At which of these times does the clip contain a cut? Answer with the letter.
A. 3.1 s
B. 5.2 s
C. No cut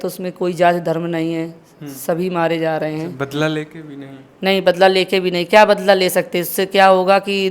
A